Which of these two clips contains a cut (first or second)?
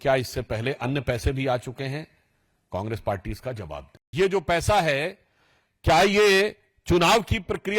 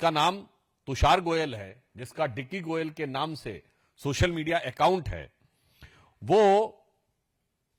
first